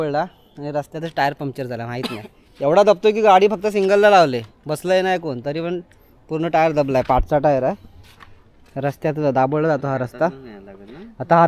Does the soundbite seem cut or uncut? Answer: uncut